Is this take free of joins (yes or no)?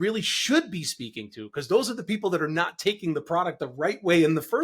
yes